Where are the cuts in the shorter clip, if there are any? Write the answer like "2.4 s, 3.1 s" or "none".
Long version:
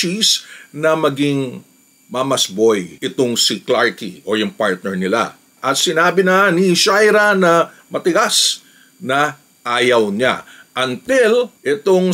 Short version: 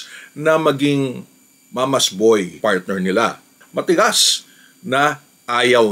2.6 s, 3.6 s